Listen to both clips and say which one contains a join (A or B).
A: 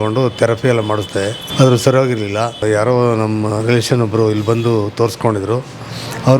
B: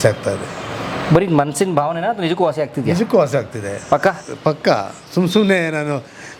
A